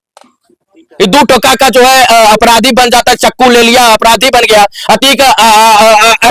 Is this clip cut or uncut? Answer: uncut